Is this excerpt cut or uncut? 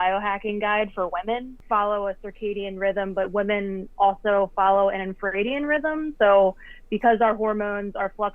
cut